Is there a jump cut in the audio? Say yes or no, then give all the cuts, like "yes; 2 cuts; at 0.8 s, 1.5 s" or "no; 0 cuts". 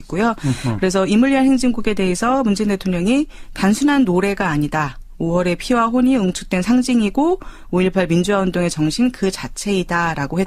yes; 1 cut; at 4.6 s